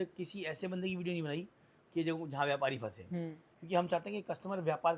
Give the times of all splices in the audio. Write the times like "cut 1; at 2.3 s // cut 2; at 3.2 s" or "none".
none